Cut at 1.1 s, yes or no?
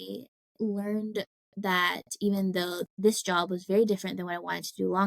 no